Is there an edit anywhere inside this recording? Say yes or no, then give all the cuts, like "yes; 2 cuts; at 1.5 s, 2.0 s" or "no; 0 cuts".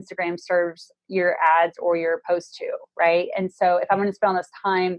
no; 0 cuts